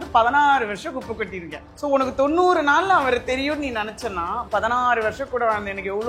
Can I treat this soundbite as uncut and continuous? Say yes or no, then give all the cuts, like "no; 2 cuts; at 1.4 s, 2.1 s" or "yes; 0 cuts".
no; 1 cut; at 4.4 s